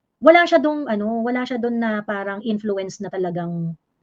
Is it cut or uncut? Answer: uncut